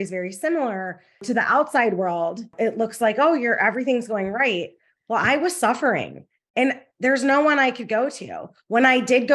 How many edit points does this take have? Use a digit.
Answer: 2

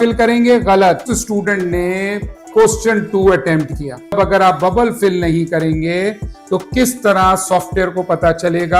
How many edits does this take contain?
1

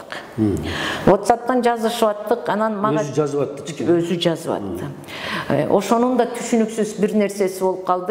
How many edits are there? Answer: 0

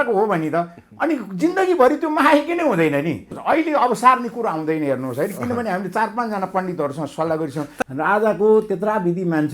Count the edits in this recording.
2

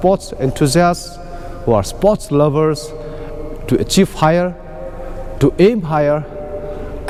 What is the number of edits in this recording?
0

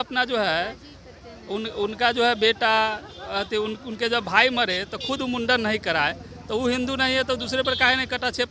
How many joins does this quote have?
0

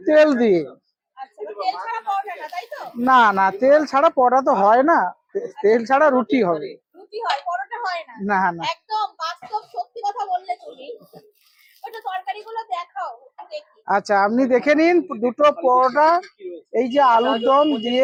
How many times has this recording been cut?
0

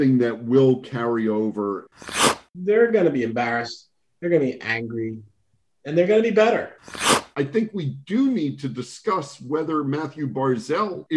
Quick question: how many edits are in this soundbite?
2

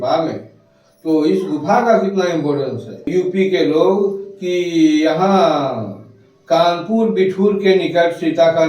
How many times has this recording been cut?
1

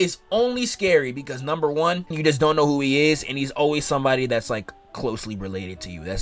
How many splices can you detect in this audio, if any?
1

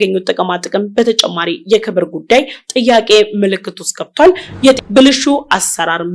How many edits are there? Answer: 1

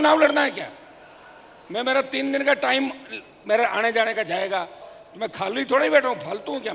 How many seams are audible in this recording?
1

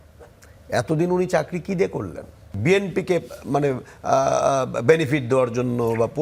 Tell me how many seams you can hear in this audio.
1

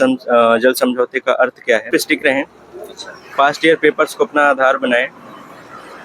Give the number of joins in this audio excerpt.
1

